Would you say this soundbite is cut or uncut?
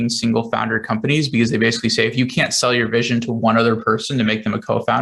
uncut